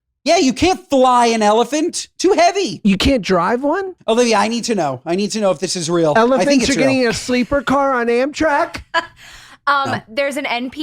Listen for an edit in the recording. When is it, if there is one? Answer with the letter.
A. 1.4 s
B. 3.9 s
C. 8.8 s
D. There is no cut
B